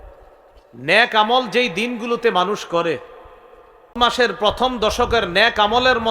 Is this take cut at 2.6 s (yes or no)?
no